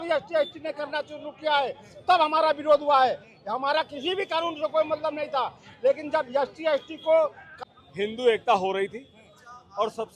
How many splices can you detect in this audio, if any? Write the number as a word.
one